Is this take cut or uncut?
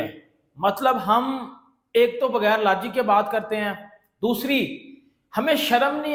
uncut